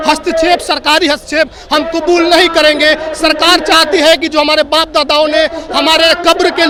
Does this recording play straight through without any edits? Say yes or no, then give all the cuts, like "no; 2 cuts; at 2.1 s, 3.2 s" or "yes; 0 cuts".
yes; 0 cuts